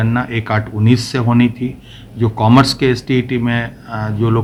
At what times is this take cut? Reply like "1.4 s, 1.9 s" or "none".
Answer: none